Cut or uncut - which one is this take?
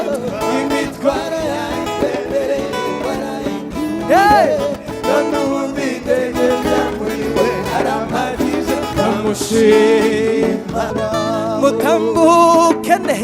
cut